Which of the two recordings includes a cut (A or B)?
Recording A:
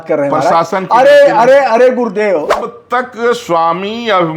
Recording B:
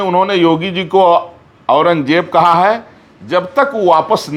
A